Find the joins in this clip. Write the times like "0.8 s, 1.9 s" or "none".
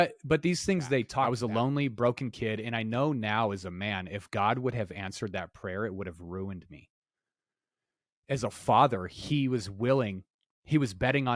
1.2 s